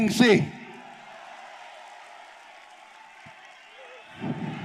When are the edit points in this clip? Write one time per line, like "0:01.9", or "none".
none